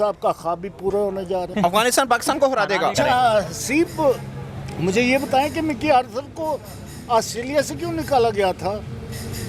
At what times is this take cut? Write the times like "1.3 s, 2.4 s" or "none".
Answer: 1.5 s, 2.9 s

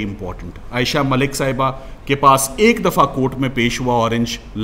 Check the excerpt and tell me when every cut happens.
none

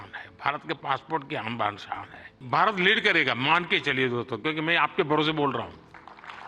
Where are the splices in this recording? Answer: 2.3 s

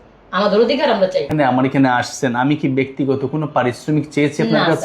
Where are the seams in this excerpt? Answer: 1.3 s

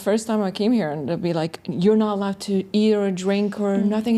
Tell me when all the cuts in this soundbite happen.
none

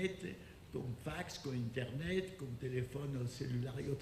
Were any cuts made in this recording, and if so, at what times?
2.0 s

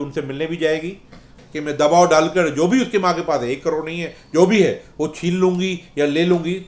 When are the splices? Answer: 1.5 s

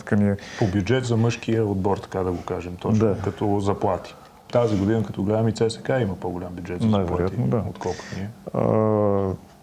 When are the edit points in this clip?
4.5 s

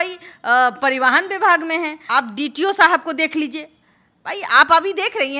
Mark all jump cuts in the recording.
none

